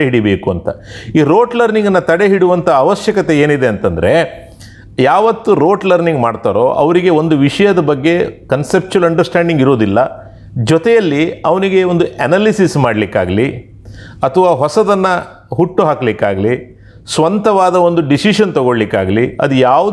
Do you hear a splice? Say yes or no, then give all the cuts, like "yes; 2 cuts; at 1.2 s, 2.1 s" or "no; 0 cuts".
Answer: no; 0 cuts